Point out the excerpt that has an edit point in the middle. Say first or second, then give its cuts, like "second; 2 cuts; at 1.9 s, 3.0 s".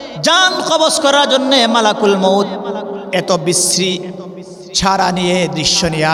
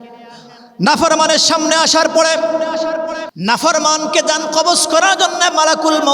second; 1 cut; at 3.2 s